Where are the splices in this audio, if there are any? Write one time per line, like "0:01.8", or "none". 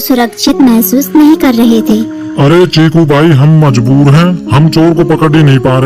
0:04.0